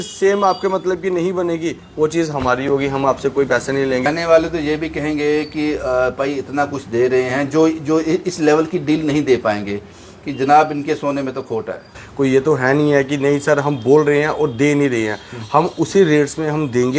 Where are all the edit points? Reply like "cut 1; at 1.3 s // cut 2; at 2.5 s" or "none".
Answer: cut 1; at 4.0 s // cut 2; at 12.0 s

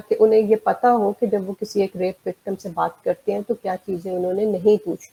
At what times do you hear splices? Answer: none

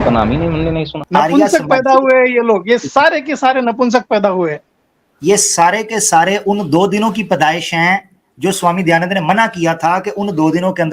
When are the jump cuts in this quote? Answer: cut 1; at 1.0 s

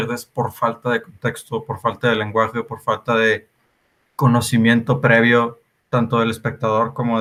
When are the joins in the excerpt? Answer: none

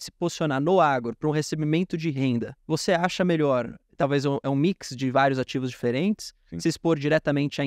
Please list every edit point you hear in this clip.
cut 1; at 2.6 s

